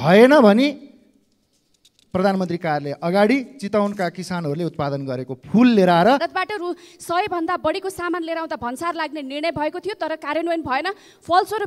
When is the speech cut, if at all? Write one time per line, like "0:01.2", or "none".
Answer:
0:06.2